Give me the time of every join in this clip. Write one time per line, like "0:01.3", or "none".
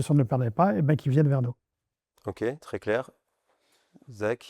none